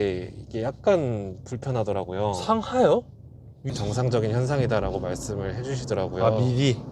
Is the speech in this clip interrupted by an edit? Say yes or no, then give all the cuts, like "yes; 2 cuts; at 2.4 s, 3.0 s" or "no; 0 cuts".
yes; 1 cut; at 3.7 s